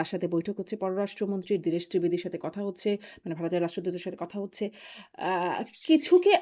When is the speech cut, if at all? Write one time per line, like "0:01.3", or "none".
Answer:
none